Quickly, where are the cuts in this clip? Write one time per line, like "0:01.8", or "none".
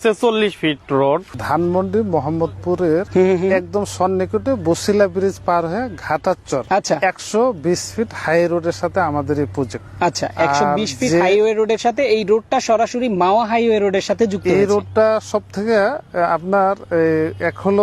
0:01.3
0:03.1
0:06.6
0:09.8